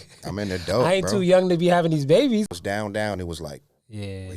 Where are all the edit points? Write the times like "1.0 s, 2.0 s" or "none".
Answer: 2.5 s